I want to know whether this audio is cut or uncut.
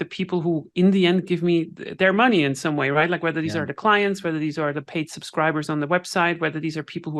uncut